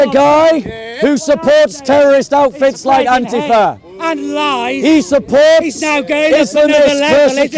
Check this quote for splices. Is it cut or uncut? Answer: uncut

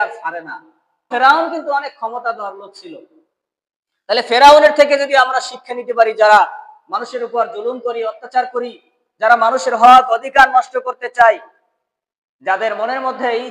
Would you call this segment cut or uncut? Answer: cut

